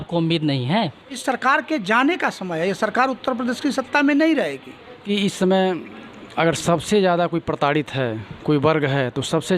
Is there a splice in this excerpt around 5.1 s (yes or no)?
yes